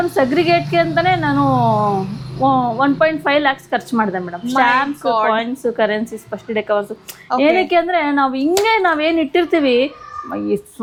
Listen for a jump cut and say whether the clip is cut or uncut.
uncut